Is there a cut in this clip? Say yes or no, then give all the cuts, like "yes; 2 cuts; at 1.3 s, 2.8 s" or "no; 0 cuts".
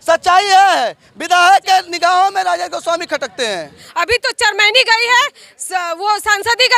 yes; 1 cut; at 3.8 s